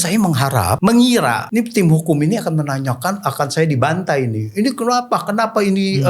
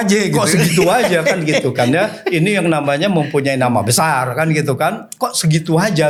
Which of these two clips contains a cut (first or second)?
first